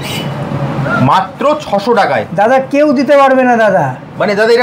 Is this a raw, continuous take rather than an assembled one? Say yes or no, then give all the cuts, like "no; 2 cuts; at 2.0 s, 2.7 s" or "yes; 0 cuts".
yes; 0 cuts